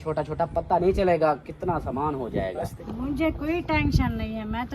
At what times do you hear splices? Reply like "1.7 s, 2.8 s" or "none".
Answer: 2.7 s